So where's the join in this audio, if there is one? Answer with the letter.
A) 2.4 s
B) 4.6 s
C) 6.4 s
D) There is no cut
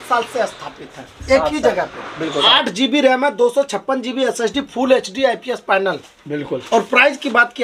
A